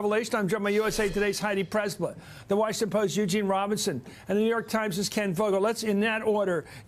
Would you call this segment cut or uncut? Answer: uncut